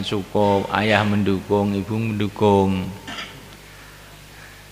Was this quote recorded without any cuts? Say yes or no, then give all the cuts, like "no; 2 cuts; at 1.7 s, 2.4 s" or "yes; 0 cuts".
yes; 0 cuts